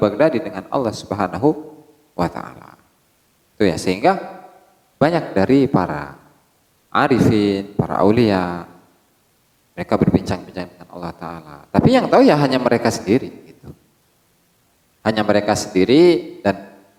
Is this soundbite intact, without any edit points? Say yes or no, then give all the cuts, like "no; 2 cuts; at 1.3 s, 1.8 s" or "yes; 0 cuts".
yes; 0 cuts